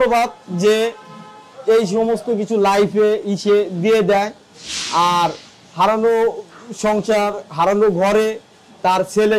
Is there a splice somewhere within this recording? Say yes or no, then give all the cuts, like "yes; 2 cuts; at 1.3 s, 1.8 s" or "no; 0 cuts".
no; 0 cuts